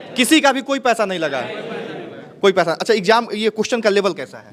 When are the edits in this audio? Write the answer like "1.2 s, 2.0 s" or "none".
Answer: none